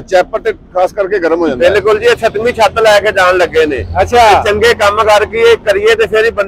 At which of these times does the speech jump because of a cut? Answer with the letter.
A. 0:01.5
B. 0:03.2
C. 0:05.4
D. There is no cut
A